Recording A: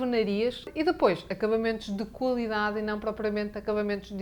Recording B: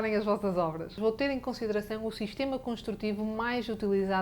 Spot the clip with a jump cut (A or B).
B